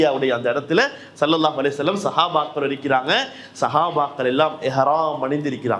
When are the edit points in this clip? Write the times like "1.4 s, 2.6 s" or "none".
none